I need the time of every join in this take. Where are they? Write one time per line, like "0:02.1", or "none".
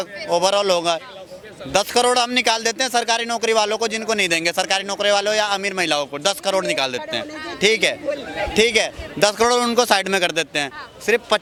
none